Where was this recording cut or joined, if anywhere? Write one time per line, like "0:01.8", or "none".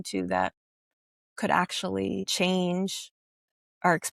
0:02.3